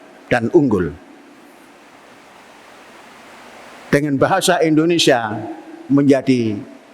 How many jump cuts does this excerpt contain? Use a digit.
0